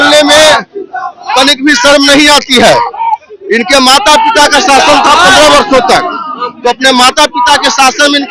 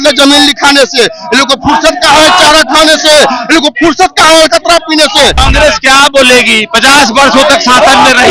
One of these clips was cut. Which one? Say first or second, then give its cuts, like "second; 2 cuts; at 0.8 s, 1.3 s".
second; 1 cut; at 5.4 s